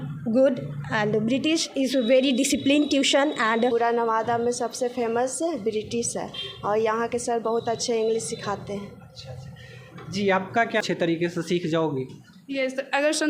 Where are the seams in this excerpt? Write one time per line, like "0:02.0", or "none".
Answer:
0:03.7
0:10.9